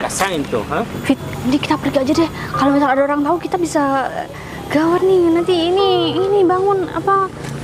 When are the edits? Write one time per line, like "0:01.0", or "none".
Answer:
0:01.0